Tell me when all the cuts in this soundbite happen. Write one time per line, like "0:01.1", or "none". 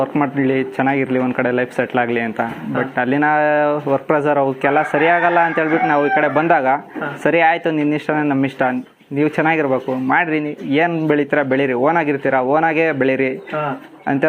none